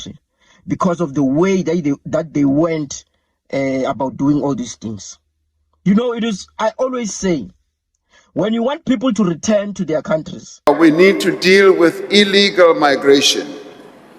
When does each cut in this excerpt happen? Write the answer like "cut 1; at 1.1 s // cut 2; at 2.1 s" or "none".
cut 1; at 10.7 s